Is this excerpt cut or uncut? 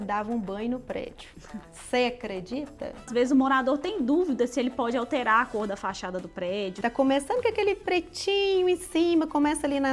cut